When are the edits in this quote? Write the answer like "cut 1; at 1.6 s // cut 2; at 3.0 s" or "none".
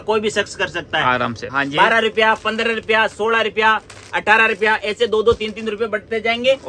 cut 1; at 1.5 s

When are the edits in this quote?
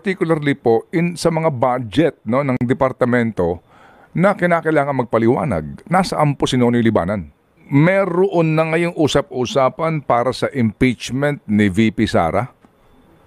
cut 1; at 7.6 s

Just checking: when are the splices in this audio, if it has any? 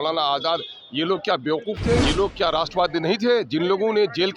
cut 1; at 2.0 s

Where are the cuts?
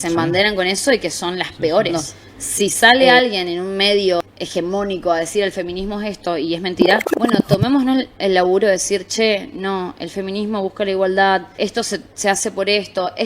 cut 1; at 1.9 s // cut 2; at 4.2 s // cut 3; at 7.1 s // cut 4; at 11.5 s

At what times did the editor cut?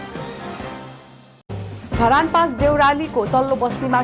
none

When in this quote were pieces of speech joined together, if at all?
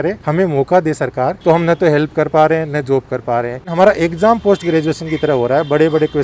cut 1; at 1.4 s // cut 2; at 3.7 s

